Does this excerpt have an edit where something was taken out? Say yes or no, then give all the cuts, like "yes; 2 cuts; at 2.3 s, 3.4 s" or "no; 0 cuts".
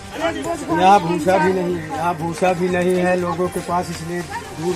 yes; 1 cut; at 1.8 s